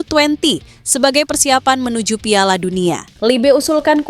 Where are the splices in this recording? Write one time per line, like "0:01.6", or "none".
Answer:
0:03.1